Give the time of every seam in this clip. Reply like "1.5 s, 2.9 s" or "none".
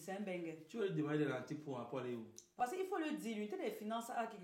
2.5 s